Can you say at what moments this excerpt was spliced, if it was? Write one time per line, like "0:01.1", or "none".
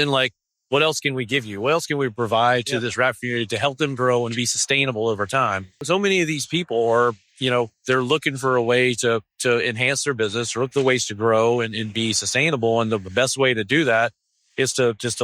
0:05.8